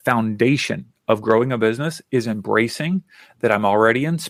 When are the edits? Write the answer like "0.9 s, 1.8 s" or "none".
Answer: none